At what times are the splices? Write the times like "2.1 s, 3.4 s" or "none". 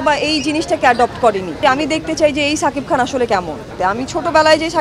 1.6 s, 3.8 s